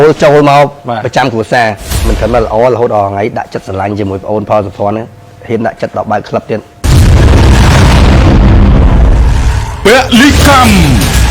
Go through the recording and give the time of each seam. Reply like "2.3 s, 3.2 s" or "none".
1.8 s, 6.7 s

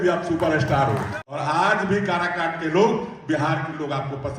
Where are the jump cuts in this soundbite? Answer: 1.2 s

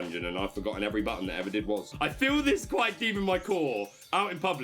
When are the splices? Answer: 1.9 s

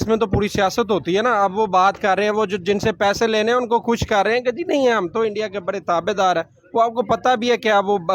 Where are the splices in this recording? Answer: none

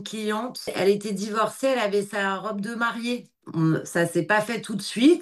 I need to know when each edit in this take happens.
3.4 s

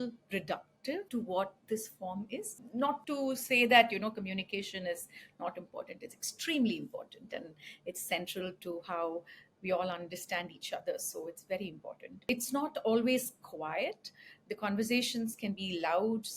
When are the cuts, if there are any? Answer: 1.1 s, 2.9 s, 12.3 s

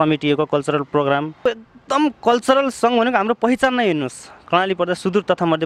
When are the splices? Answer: 1.4 s

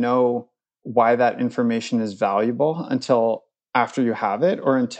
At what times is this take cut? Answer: none

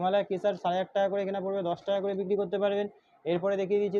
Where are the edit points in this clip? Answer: none

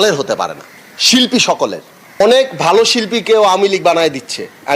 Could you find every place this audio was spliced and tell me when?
2.2 s

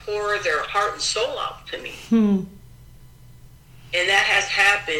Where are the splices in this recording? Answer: none

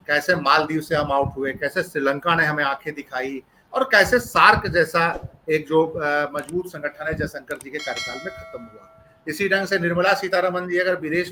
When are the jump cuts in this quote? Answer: none

